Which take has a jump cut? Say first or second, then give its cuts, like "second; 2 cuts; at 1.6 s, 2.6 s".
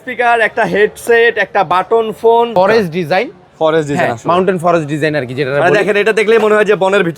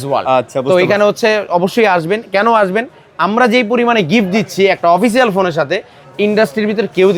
first; 1 cut; at 2.6 s